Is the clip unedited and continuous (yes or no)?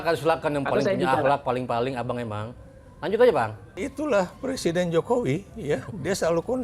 no